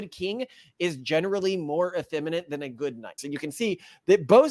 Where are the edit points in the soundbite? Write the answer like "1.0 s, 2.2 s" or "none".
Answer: 3.2 s